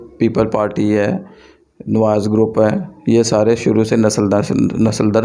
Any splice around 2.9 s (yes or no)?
no